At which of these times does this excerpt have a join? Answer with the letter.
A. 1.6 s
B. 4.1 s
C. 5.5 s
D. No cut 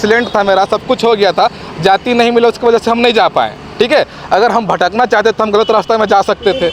D